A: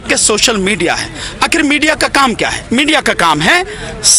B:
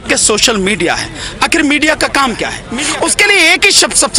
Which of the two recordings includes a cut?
B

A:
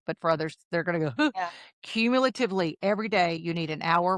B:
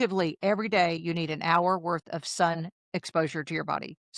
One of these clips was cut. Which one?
B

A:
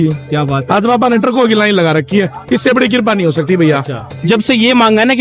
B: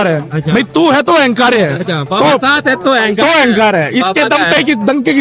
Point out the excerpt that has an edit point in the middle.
A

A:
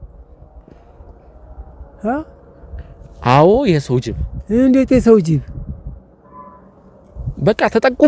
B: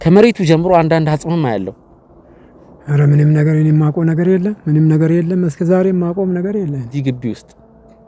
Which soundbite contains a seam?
B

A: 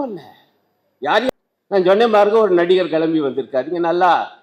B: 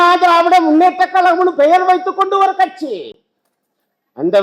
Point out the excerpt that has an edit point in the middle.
A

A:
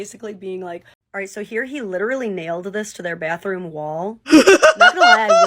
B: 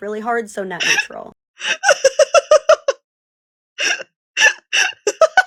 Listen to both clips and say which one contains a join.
A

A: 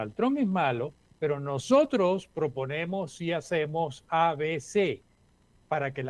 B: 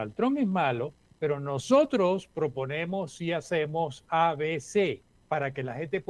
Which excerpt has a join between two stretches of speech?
B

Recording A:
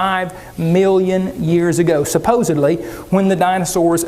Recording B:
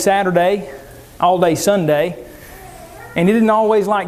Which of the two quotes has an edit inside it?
A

